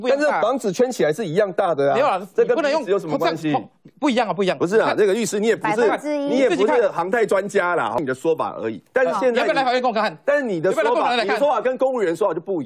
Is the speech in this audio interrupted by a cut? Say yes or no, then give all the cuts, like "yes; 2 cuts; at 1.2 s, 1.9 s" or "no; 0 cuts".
yes; 1 cut; at 8.0 s